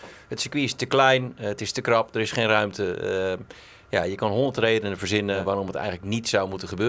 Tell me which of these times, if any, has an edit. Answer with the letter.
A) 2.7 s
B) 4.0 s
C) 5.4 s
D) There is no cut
C